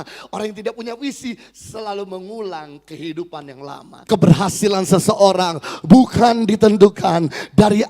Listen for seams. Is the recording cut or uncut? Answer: cut